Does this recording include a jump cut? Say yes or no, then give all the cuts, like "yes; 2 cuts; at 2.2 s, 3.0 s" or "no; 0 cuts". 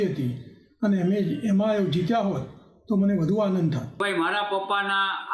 yes; 1 cut; at 4.0 s